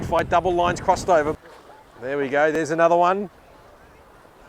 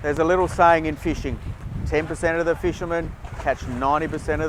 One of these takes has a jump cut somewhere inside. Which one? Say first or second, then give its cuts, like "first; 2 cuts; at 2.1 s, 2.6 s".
first; 1 cut; at 1.4 s